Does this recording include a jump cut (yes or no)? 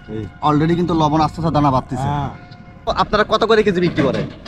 yes